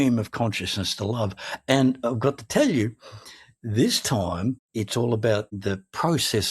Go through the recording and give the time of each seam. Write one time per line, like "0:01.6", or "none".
0:04.6
0:05.5